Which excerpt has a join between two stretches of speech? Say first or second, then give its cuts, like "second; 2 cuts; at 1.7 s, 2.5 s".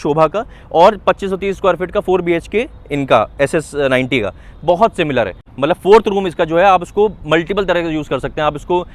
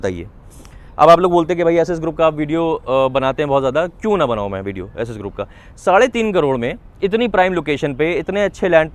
first; 1 cut; at 5.5 s